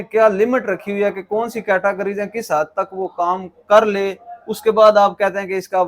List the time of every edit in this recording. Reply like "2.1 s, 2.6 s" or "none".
none